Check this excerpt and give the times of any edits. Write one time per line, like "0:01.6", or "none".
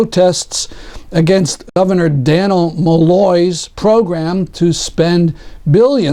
0:01.8